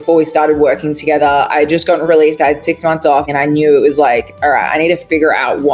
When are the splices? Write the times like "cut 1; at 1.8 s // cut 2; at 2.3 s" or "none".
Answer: cut 1; at 3.3 s